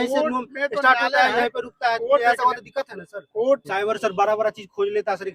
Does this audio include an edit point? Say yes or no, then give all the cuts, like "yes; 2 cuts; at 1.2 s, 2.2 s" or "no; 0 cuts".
yes; 1 cut; at 3.6 s